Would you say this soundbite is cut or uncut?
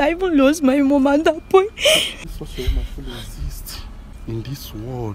cut